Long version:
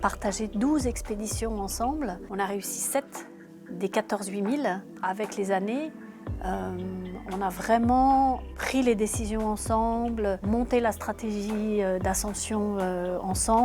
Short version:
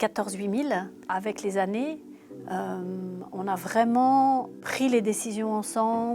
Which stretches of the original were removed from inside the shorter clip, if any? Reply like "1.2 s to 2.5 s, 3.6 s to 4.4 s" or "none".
none